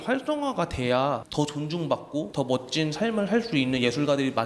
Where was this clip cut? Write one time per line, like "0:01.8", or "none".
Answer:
0:01.3
0:02.3